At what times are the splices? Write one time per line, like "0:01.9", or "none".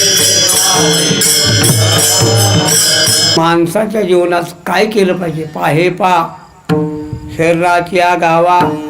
0:03.4